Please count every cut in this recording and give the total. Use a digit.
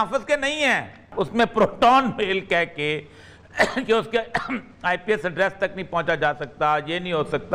1